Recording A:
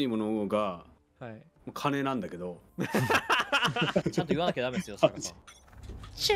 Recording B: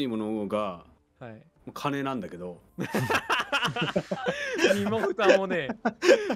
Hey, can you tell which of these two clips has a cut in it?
A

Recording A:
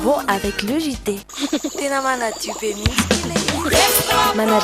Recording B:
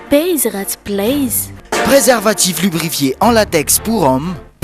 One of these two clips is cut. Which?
A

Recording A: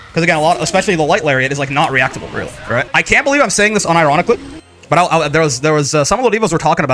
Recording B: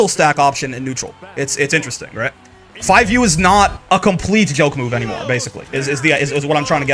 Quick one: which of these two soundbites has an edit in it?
A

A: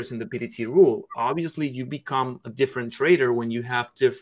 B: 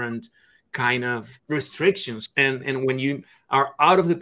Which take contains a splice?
B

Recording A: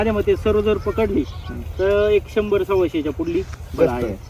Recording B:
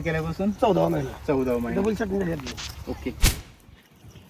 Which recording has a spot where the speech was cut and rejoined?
B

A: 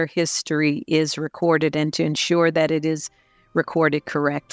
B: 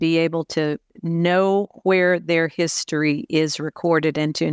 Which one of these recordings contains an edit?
B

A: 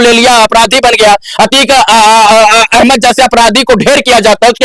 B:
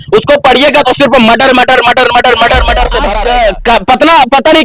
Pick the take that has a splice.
B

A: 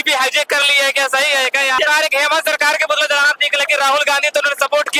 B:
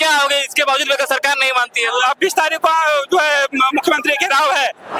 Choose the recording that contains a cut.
A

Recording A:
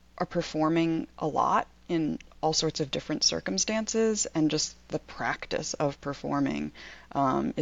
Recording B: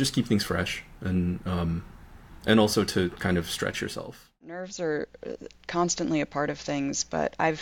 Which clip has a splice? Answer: B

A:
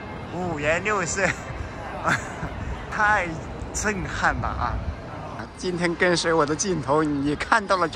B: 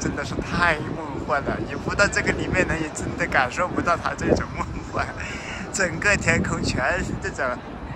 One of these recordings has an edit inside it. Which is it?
A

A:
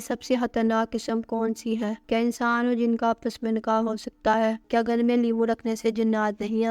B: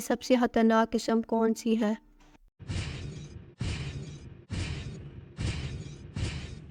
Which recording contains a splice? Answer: A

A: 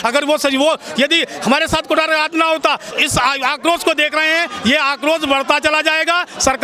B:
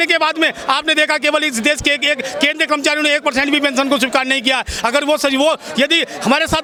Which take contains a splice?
A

